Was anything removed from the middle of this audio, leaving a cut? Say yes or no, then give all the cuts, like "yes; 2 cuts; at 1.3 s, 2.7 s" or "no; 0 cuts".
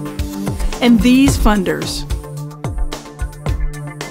no; 0 cuts